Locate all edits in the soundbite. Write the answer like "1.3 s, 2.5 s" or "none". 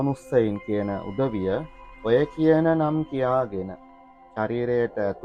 none